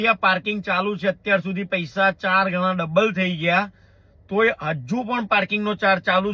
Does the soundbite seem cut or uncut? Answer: uncut